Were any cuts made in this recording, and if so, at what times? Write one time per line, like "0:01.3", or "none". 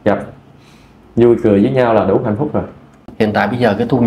0:03.1